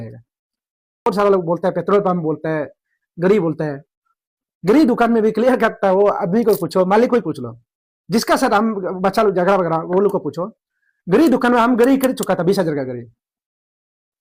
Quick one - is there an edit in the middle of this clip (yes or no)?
yes